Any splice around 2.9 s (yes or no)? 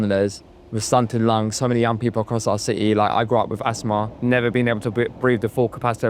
no